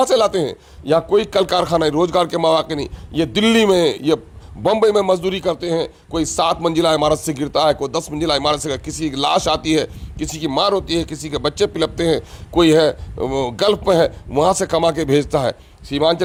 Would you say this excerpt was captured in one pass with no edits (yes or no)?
yes